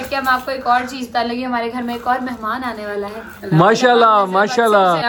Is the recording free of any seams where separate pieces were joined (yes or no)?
yes